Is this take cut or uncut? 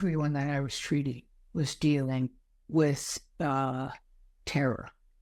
uncut